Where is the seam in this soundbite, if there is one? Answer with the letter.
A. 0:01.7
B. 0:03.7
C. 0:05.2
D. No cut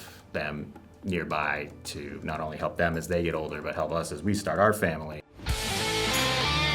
C